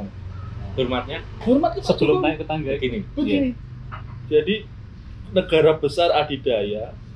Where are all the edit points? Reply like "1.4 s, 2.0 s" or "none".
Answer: none